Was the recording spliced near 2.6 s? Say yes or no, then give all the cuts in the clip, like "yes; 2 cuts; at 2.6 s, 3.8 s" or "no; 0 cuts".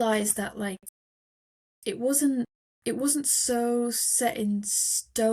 yes; 1 cut; at 2.6 s